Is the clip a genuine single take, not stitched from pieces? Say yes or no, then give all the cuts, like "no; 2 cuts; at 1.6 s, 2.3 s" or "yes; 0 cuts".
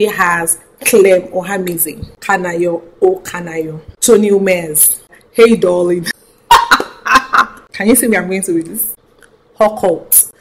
no; 1 cut; at 8.8 s